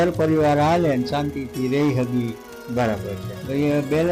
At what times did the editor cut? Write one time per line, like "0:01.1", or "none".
none